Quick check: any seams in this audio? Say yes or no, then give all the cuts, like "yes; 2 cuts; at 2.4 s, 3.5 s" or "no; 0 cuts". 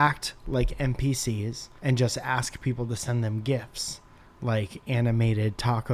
yes; 1 cut; at 1.6 s